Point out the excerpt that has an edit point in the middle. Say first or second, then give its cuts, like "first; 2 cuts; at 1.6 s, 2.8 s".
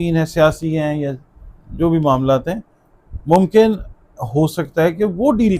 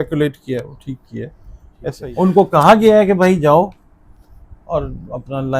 second; 1 cut; at 2.0 s